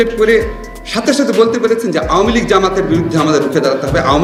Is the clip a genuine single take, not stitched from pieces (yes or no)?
yes